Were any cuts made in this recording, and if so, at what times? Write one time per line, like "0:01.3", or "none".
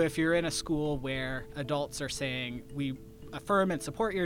0:01.5